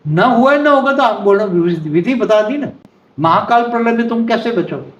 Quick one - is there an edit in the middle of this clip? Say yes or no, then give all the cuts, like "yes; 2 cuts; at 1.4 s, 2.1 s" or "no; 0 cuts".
no; 0 cuts